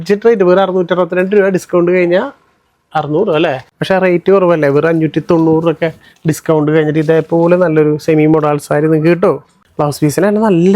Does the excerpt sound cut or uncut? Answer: cut